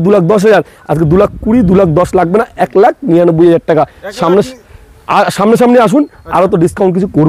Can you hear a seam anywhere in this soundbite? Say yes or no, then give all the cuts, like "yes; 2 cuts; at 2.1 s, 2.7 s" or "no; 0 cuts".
no; 0 cuts